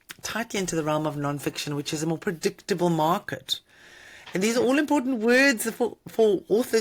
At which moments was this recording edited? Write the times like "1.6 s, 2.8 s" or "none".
none